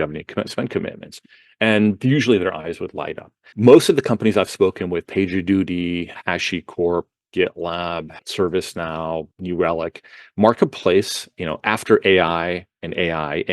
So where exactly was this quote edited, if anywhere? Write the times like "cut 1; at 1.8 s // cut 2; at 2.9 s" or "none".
cut 1; at 3.5 s // cut 2; at 6.2 s // cut 3; at 8.2 s // cut 4; at 9.3 s

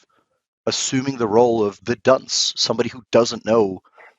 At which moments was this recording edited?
cut 1; at 1.8 s

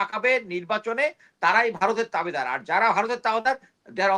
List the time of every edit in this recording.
none

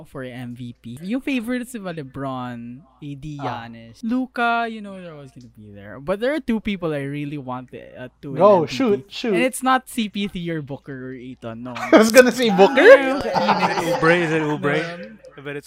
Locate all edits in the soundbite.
cut 1; at 1.0 s // cut 2; at 3.8 s

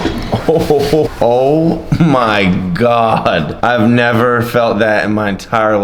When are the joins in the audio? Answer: cut 1; at 1.1 s // cut 2; at 3.5 s

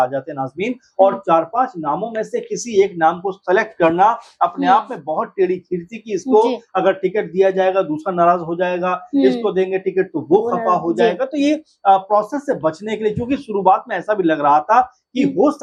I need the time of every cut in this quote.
none

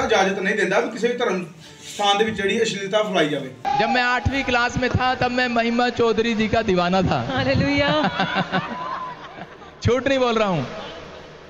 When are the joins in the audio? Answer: cut 1; at 3.5 s

